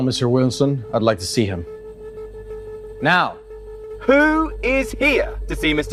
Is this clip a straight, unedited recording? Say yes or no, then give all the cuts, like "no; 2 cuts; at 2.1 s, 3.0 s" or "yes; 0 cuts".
yes; 0 cuts